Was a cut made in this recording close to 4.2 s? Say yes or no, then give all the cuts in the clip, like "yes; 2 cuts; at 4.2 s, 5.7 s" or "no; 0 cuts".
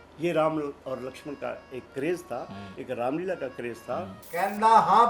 yes; 1 cut; at 4.2 s